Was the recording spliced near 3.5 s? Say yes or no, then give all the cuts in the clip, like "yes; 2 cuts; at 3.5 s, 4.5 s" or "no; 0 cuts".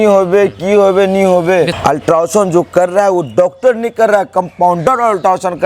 no; 1 cut; at 1.7 s